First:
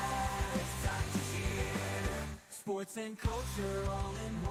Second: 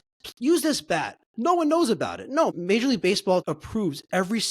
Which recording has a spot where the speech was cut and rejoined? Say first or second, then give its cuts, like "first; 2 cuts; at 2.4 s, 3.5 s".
second; 2 cuts; at 2.5 s, 3.4 s